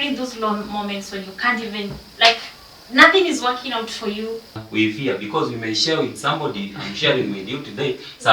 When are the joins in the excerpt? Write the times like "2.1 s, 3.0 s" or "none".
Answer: 4.6 s